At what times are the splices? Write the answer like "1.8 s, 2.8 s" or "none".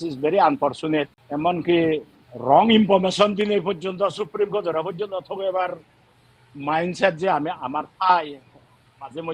1.2 s

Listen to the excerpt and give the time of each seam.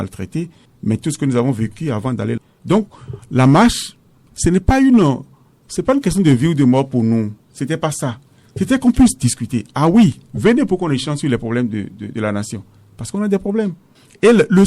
2.4 s

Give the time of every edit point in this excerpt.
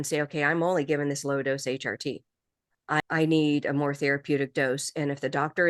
3.0 s

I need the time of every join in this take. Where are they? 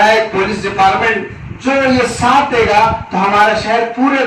none

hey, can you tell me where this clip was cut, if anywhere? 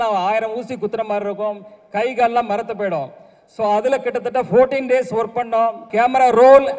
5.8 s

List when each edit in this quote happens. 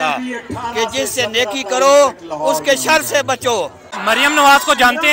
3.9 s

